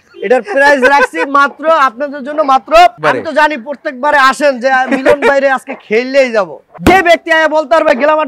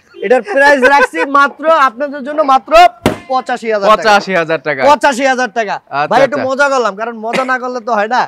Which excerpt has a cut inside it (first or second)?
first